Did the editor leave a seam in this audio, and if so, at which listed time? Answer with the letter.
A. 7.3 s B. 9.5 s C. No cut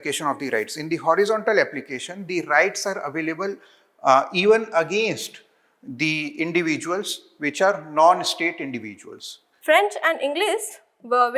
B